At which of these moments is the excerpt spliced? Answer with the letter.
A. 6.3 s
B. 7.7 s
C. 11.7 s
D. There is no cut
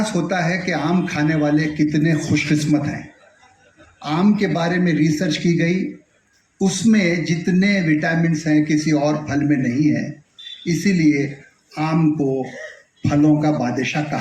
D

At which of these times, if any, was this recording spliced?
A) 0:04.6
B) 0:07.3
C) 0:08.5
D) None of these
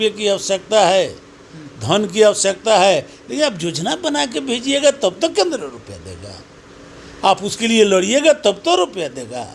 D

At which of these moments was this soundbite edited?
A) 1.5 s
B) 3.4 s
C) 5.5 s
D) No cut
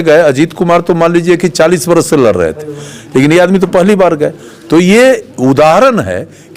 D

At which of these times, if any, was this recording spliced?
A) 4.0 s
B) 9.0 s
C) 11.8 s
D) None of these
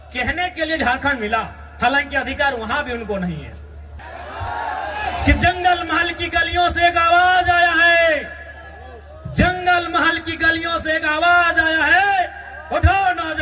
A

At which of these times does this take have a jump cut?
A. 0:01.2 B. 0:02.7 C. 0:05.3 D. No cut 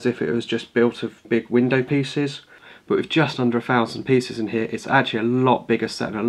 A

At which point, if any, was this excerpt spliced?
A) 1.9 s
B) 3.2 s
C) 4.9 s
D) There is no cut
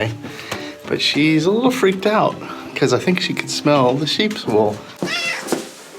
C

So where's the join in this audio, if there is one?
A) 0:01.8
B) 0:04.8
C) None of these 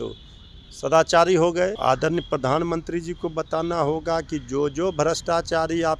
A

